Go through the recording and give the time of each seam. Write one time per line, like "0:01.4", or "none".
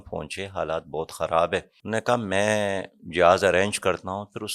0:01.8